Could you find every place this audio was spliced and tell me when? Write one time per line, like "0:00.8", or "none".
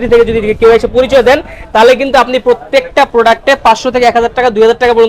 none

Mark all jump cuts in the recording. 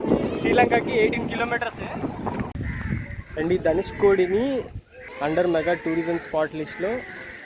0:02.5

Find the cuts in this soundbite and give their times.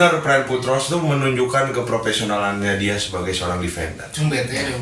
none

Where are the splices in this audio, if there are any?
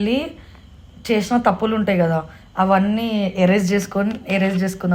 none

